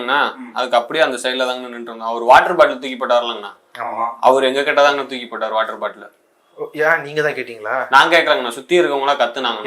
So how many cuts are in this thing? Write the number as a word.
zero